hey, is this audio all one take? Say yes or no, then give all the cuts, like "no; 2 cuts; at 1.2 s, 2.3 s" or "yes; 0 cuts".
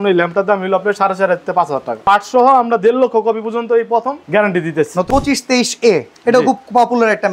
no; 2 cuts; at 2.0 s, 5.1 s